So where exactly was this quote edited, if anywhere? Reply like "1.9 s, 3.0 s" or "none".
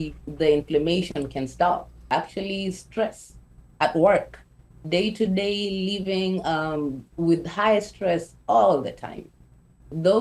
2.0 s